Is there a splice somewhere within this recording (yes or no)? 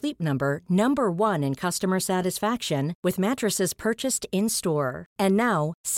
no